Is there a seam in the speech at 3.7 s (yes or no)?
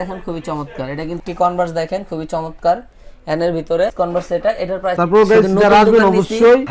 no